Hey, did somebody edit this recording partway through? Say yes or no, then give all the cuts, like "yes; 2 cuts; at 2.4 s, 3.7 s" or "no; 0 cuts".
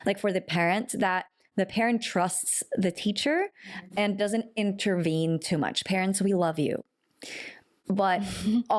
no; 0 cuts